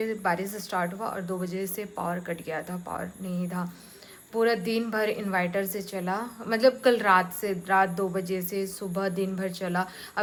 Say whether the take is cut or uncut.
uncut